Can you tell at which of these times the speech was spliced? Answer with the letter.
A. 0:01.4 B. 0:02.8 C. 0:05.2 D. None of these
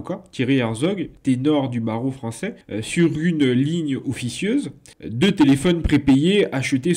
D